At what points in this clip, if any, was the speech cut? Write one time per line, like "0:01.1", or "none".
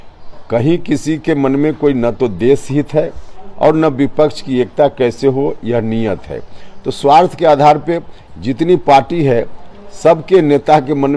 none